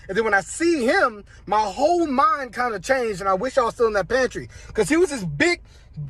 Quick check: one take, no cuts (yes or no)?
yes